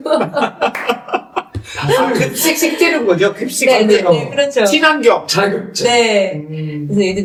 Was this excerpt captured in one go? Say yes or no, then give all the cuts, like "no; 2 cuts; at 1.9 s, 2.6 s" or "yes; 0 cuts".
yes; 0 cuts